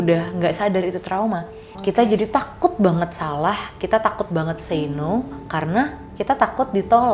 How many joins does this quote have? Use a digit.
1